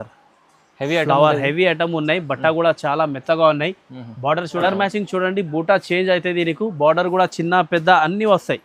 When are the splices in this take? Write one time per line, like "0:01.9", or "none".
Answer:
0:04.6